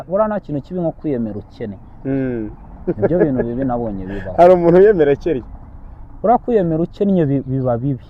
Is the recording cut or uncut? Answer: uncut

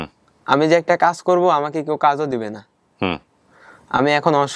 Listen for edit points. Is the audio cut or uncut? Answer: uncut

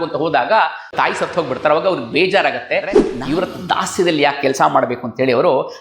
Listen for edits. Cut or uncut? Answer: cut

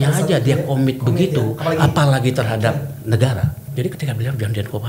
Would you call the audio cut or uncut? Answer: cut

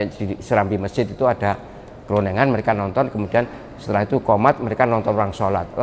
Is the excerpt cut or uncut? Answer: uncut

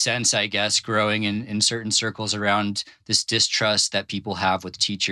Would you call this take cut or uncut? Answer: uncut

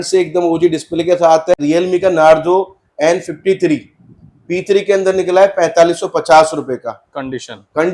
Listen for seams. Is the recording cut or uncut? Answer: cut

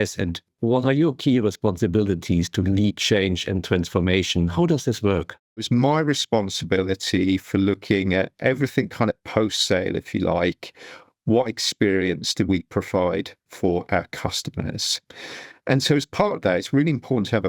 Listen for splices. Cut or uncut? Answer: cut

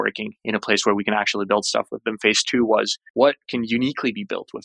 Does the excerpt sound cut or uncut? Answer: cut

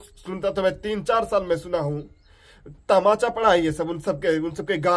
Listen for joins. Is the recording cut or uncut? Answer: uncut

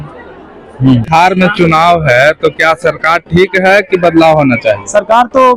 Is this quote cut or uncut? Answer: cut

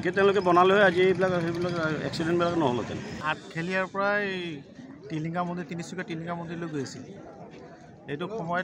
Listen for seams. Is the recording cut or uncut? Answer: cut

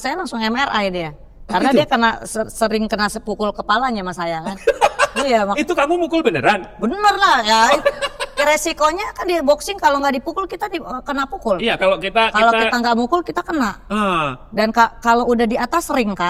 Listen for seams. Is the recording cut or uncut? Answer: uncut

